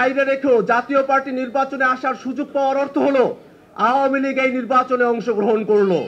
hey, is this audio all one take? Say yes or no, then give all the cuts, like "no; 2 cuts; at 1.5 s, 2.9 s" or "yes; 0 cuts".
yes; 0 cuts